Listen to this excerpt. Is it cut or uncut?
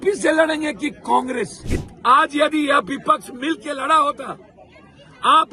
cut